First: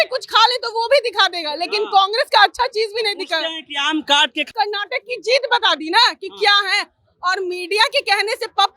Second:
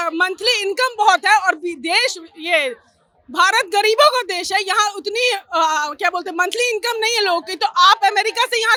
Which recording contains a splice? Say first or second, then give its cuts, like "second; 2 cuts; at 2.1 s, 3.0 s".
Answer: first; 1 cut; at 4.5 s